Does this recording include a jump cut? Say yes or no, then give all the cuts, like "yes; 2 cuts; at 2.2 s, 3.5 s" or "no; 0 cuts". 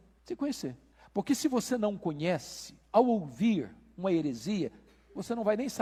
no; 0 cuts